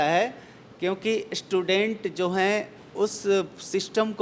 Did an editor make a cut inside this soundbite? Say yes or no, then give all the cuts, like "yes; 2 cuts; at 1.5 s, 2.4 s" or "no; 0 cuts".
no; 0 cuts